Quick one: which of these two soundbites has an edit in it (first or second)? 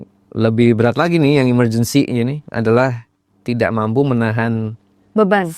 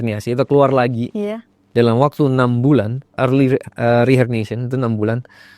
second